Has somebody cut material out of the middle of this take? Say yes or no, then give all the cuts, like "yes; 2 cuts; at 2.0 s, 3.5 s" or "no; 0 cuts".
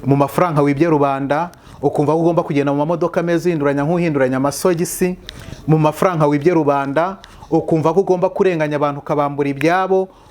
no; 0 cuts